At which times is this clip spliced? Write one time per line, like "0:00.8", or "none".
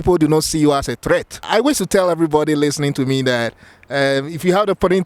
0:01.4